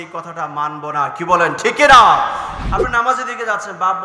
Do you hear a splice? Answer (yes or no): yes